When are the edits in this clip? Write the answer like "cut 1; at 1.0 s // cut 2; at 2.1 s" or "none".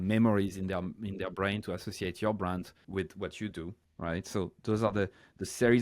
cut 1; at 2.8 s // cut 2; at 3.8 s